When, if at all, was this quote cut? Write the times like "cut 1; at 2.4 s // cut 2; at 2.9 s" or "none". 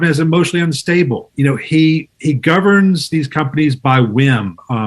cut 1; at 1.3 s